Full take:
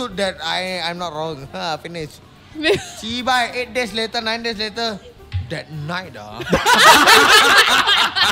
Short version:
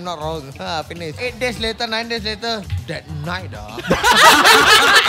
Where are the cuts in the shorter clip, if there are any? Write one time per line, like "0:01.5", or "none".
0:01.2
0:02.8